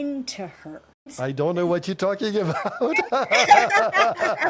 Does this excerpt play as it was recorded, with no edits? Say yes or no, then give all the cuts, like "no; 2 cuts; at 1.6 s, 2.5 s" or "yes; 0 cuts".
no; 1 cut; at 1.1 s